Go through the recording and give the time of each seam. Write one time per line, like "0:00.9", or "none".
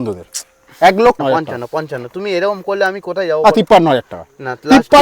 0:01.2